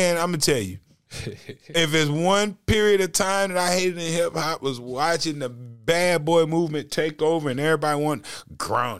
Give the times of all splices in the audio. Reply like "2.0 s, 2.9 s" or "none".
none